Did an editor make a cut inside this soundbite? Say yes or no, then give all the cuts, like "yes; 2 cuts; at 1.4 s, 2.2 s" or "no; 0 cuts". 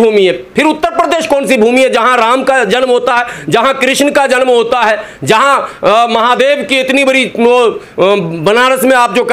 no; 0 cuts